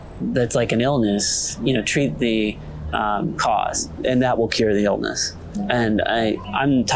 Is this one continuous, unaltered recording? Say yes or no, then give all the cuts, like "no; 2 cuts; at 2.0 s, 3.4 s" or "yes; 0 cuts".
no; 2 cuts; at 1.4 s, 3.9 s